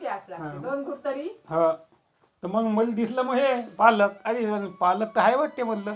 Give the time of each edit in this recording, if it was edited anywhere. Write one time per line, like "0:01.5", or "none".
none